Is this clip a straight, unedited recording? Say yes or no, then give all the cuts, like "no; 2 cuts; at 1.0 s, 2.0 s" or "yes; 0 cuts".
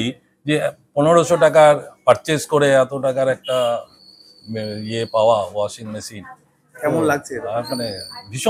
yes; 0 cuts